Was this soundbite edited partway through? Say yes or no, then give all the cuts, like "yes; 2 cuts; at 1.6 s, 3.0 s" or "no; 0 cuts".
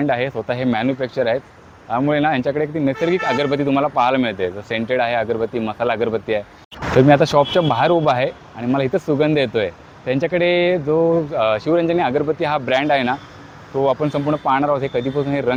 no; 0 cuts